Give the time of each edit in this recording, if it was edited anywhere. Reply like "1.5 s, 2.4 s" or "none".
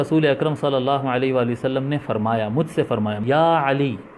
3.2 s